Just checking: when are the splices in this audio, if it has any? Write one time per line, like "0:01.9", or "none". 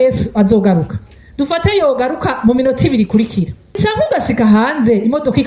0:03.8